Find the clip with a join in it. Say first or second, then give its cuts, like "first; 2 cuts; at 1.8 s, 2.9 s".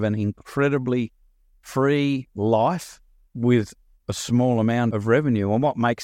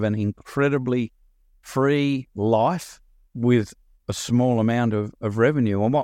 first; 1 cut; at 4.9 s